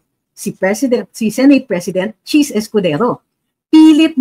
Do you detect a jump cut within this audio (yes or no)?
no